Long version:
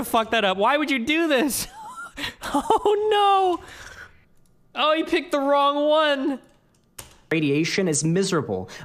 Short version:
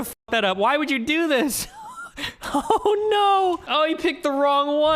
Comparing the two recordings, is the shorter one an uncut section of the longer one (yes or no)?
no